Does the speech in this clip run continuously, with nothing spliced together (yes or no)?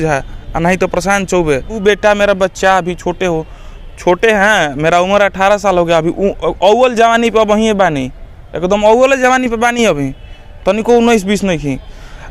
no